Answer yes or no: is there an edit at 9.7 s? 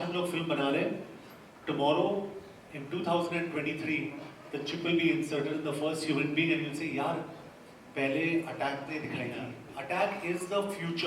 yes